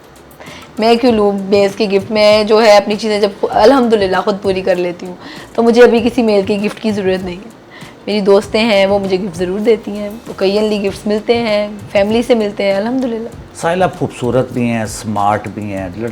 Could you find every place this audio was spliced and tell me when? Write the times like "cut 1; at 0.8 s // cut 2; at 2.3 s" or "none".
none